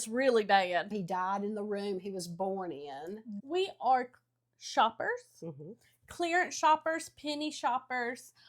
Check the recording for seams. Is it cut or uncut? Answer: cut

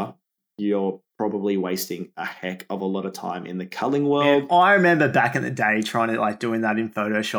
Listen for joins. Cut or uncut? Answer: cut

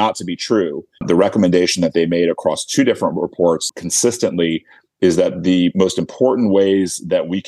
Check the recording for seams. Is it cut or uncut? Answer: cut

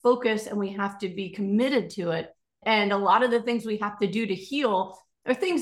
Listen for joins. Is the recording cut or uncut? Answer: cut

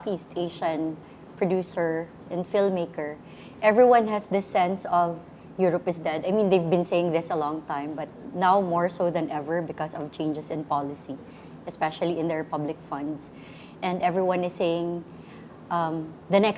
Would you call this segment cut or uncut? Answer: uncut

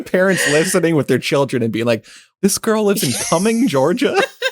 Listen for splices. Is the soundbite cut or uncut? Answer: cut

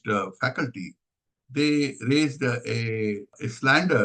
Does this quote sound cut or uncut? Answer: uncut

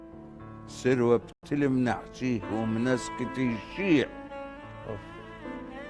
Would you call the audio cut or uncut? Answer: cut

